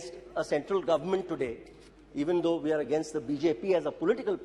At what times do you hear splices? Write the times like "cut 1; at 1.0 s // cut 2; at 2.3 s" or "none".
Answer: none